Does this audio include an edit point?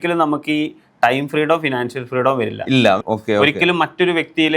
yes; 1 cut; at 3.0 s

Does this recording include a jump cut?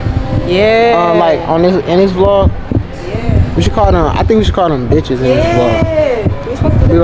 no; 0 cuts

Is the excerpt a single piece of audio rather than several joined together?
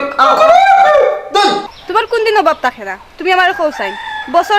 no; 1 cut; at 1.7 s

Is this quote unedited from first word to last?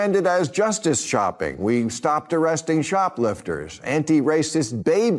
yes; 0 cuts

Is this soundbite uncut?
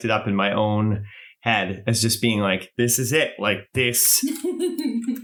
yes; 0 cuts

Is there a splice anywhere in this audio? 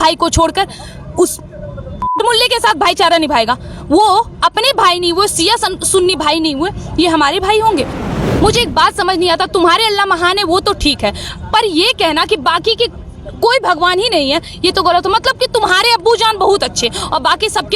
yes; 1 cut; at 8.0 s

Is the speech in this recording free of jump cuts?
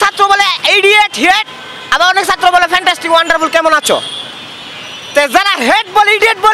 yes; 0 cuts

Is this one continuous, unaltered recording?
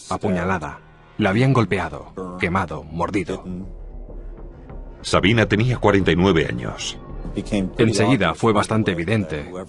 no; 1 cut; at 2.5 s

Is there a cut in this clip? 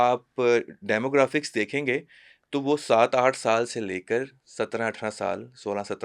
no; 0 cuts

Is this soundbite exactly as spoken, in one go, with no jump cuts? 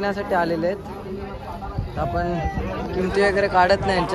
yes; 0 cuts

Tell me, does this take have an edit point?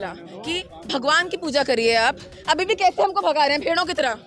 no; 0 cuts

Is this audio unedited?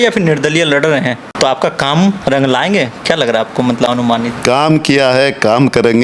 no; 1 cut; at 1.3 s

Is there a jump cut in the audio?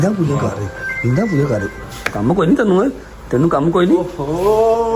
no; 0 cuts

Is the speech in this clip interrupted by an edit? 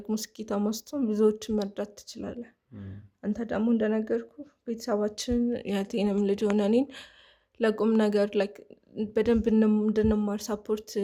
no; 0 cuts

